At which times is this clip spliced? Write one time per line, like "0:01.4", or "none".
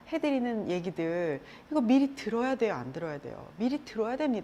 none